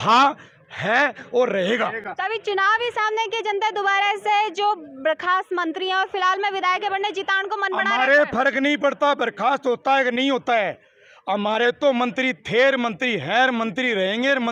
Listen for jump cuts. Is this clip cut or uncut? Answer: uncut